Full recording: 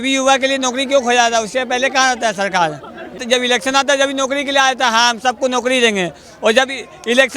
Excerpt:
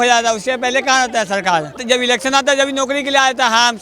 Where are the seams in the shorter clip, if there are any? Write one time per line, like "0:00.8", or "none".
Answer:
0:01.7